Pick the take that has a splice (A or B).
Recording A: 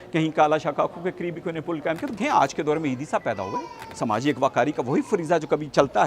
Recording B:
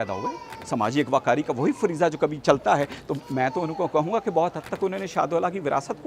A